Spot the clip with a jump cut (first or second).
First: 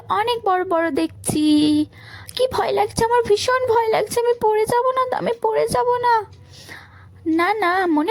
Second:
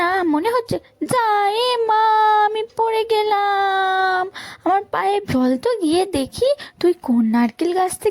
second